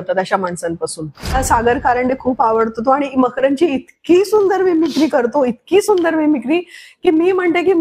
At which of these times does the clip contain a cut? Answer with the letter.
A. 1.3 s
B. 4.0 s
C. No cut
A